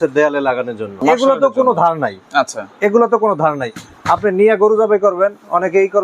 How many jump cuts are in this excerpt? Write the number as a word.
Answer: one